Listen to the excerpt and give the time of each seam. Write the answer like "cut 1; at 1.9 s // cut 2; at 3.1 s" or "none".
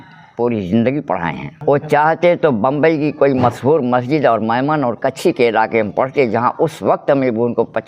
cut 1; at 1.5 s